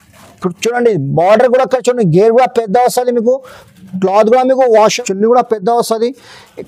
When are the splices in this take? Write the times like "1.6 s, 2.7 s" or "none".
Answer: 4.8 s